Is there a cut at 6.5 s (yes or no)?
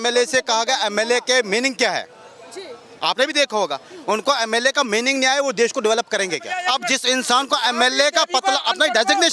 yes